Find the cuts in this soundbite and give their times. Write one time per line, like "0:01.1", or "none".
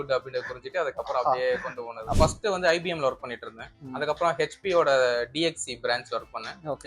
0:02.2